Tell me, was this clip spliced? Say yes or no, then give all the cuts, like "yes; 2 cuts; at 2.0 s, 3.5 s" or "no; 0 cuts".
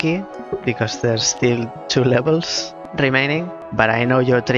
yes; 2 cuts; at 2.8 s, 3.6 s